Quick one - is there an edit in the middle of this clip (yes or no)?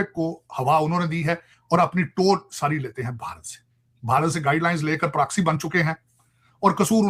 no